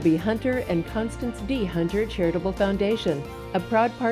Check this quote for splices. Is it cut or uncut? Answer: uncut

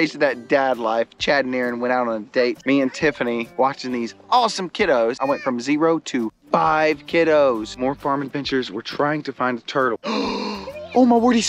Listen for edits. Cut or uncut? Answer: cut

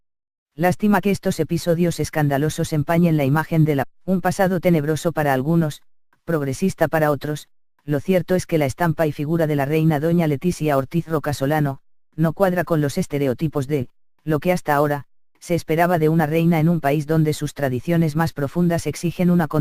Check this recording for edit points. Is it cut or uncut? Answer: uncut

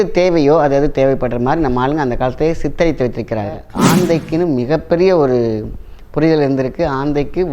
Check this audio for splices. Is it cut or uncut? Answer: cut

